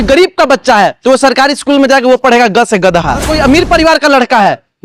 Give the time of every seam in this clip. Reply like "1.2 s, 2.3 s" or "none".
3.3 s